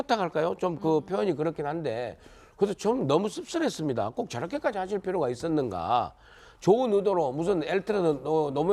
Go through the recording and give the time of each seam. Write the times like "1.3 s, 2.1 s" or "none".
4.6 s